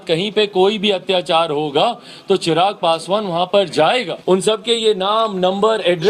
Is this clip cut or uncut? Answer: cut